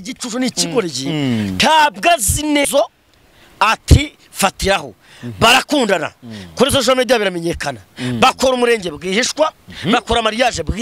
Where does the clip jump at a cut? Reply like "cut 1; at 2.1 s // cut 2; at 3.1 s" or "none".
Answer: cut 1; at 2.6 s